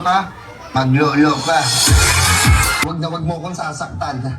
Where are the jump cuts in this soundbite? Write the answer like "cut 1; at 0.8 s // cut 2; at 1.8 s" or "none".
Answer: cut 1; at 2.8 s